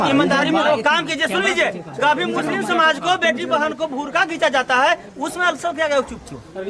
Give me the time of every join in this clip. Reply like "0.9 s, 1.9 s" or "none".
none